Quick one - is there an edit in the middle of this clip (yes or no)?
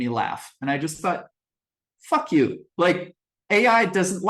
no